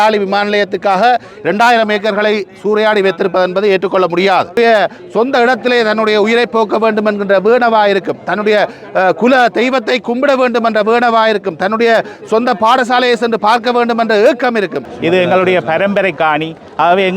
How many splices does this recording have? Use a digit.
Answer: 2